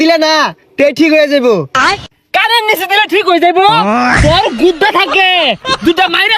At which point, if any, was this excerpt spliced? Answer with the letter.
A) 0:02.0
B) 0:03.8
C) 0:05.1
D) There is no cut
A